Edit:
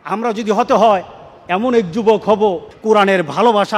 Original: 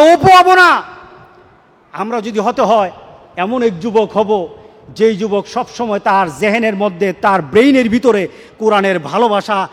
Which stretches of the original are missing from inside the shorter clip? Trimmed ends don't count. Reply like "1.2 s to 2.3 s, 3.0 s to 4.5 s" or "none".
4.6 s to 8.5 s